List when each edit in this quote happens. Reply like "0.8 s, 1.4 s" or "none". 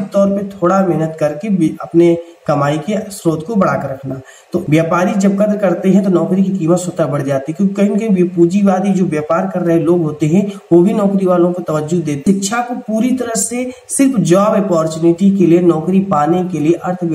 4.6 s, 12.3 s